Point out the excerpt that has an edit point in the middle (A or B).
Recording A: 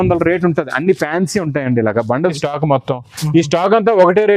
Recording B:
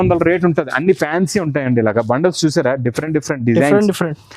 A